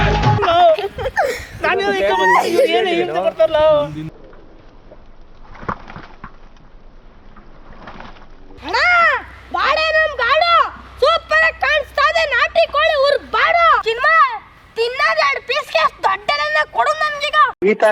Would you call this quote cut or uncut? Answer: cut